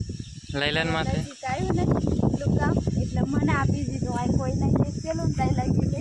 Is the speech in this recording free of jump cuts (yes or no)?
yes